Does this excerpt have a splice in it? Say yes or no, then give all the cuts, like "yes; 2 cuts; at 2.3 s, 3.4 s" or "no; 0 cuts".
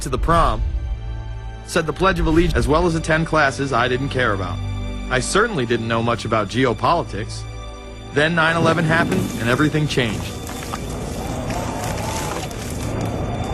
no; 0 cuts